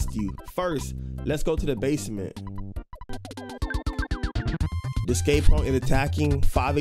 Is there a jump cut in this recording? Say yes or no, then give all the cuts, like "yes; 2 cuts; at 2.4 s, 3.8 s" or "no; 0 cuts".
yes; 1 cut; at 3.0 s